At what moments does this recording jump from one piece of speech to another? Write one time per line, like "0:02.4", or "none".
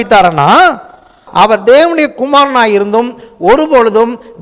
0:01.2